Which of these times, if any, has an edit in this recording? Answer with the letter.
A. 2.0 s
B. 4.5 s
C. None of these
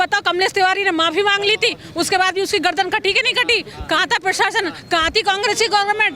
C